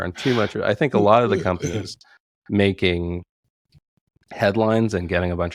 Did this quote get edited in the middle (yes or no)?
no